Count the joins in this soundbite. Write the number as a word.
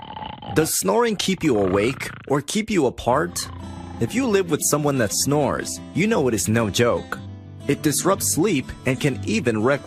zero